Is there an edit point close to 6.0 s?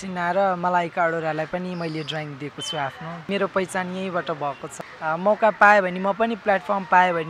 no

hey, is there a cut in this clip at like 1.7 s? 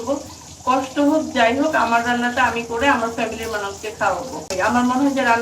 no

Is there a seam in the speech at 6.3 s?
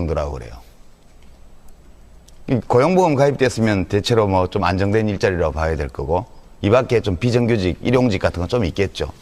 no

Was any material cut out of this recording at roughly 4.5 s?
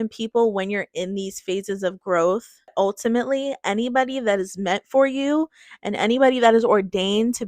no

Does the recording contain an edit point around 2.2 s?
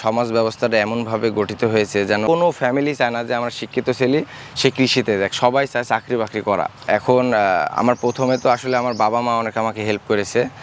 yes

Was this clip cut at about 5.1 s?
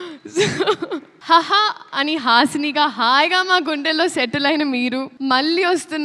yes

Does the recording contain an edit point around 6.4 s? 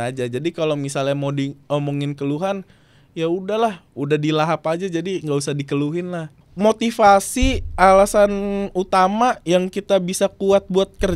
yes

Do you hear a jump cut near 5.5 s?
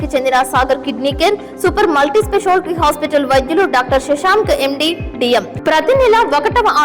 yes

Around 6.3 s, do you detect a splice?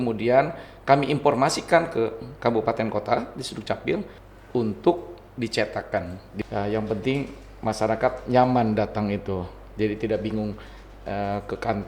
yes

